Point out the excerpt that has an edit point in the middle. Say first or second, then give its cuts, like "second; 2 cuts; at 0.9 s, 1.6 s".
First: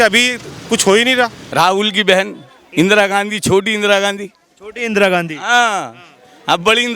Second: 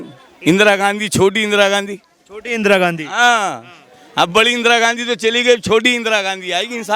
first; 1 cut; at 1.4 s